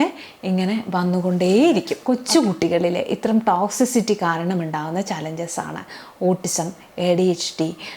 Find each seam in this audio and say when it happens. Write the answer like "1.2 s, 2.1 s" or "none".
1.9 s

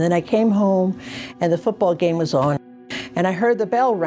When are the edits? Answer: 2.6 s

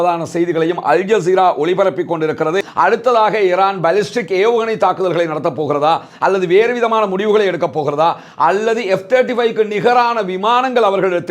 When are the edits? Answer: 2.6 s

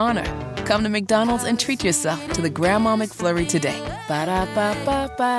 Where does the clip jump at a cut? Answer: none

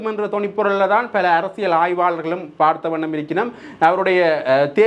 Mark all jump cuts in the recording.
none

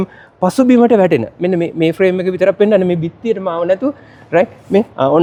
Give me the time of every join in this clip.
none

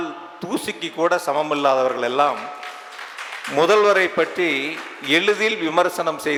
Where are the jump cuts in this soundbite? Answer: none

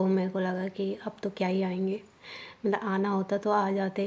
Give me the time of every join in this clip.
none

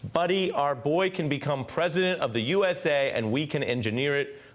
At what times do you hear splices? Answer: none

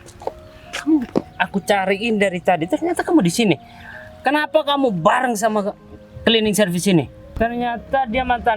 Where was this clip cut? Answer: 7.3 s

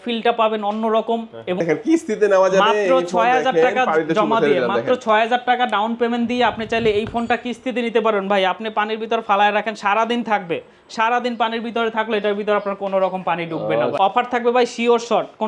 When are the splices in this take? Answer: 1.6 s, 13.9 s

